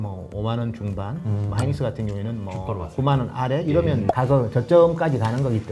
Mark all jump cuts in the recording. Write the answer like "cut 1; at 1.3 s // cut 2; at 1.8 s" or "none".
cut 1; at 4.1 s